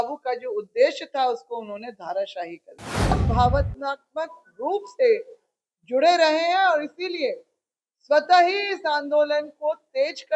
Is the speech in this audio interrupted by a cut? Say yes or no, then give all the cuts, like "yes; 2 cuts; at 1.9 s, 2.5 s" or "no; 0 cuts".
yes; 1 cut; at 3.2 s